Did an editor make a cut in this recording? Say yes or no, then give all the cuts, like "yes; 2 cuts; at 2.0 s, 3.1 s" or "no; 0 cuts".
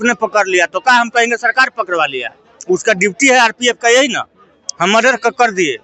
no; 0 cuts